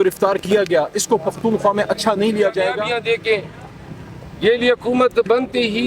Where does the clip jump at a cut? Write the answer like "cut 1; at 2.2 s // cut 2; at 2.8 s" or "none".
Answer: cut 1; at 2.8 s